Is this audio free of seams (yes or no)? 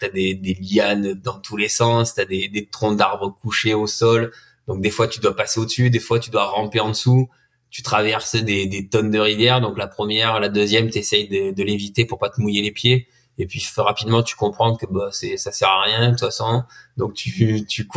yes